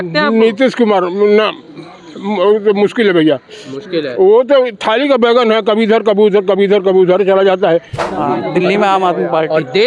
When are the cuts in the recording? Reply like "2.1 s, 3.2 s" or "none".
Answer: 8.0 s